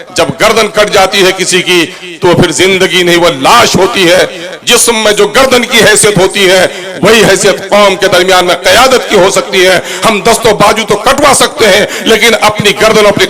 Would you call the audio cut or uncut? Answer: uncut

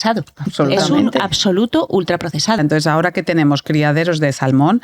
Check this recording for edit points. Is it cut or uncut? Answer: cut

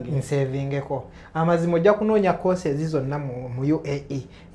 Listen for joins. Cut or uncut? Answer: uncut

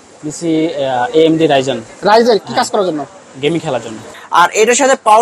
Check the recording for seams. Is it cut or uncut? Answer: cut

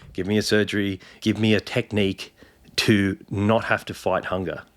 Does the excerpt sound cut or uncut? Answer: cut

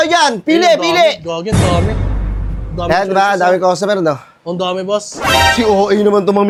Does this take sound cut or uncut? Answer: uncut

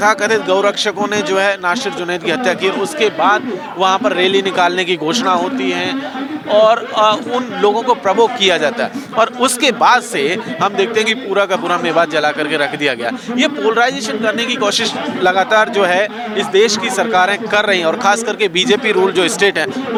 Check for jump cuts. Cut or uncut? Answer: uncut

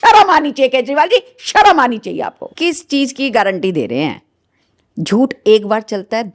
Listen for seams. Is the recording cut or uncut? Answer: cut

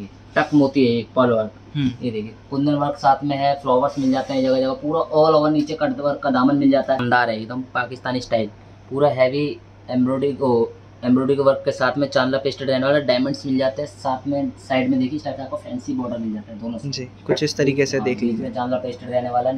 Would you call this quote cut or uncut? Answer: cut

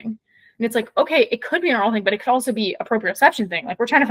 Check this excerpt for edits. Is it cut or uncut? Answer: uncut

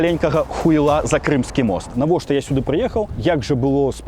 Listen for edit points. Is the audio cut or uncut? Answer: cut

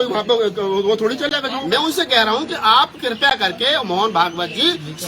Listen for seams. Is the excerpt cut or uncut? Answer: cut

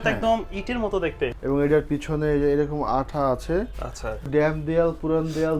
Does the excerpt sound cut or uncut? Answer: cut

